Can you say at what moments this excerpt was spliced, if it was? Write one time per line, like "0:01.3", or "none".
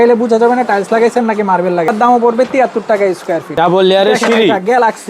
0:01.9
0:03.6